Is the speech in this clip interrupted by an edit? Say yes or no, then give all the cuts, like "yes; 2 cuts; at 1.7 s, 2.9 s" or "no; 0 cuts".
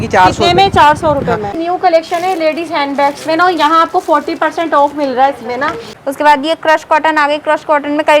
yes; 2 cuts; at 1.6 s, 5.9 s